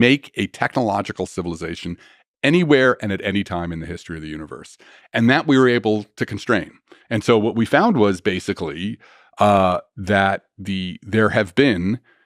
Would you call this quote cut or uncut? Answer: uncut